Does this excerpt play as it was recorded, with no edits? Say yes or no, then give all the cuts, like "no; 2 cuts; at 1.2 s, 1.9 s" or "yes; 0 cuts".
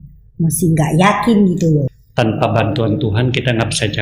no; 1 cut; at 1.9 s